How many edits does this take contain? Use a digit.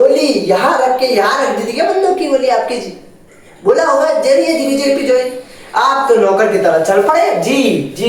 0